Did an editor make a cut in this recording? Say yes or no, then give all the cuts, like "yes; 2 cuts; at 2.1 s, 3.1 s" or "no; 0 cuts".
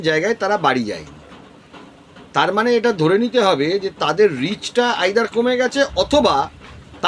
no; 0 cuts